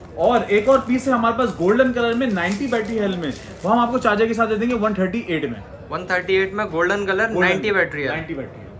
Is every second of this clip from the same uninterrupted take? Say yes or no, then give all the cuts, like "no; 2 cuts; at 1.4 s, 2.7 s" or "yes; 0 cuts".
yes; 0 cuts